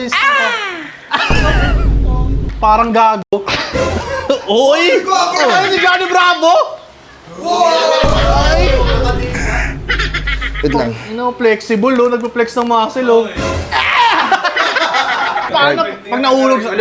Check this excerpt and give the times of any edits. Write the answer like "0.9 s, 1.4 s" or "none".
2.4 s, 15.5 s